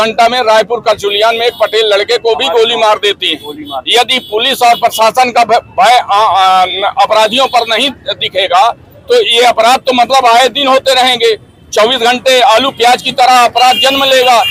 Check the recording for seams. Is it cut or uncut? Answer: uncut